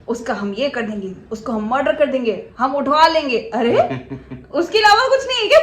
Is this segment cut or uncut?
uncut